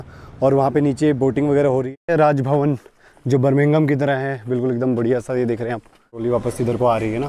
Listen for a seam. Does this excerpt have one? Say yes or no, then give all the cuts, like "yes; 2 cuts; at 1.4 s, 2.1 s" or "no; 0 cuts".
yes; 2 cuts; at 1.9 s, 6.2 s